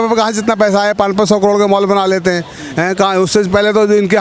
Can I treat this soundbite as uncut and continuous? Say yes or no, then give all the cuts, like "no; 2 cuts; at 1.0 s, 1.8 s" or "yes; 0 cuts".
yes; 0 cuts